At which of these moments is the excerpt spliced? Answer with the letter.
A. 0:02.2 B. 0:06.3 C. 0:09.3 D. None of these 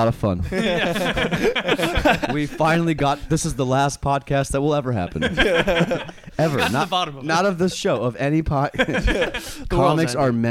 A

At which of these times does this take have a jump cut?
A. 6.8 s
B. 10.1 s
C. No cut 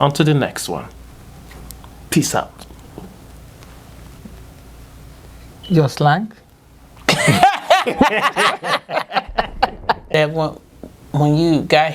B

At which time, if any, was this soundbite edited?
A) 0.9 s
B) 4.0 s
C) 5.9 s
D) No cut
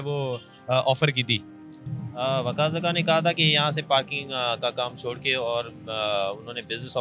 D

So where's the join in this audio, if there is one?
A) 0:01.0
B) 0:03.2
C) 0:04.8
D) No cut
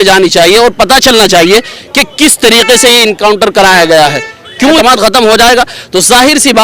C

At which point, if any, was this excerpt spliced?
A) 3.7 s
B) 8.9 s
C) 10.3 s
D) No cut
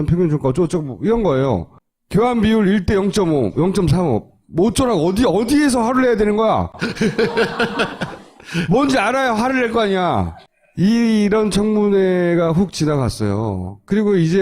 A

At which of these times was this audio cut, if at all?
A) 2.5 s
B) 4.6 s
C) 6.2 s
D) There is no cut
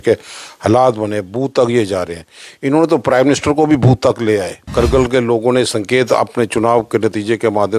B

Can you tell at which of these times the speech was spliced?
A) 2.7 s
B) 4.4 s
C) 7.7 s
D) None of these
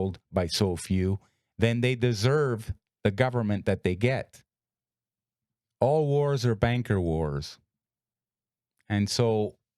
B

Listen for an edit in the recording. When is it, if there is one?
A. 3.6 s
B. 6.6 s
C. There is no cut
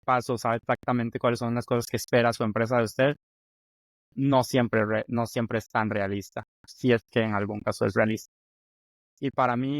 B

